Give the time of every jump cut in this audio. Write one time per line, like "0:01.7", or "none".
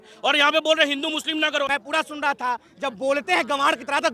0:01.7